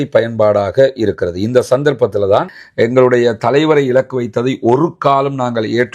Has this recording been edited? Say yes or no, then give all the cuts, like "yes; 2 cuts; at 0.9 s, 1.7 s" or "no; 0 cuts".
yes; 1 cut; at 2.5 s